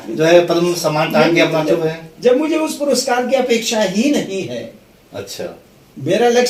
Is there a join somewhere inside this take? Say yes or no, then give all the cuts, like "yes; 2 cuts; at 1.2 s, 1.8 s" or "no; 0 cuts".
no; 0 cuts